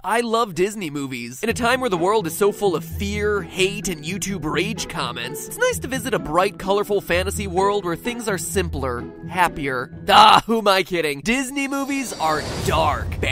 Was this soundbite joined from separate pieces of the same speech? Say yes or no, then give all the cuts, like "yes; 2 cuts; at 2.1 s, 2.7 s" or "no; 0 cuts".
no; 0 cuts